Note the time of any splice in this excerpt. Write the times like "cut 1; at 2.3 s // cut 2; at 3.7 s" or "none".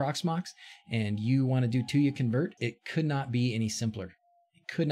cut 1; at 2.6 s